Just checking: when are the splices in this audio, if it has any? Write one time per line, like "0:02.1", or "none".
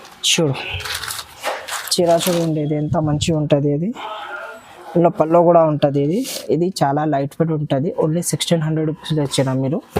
0:06.3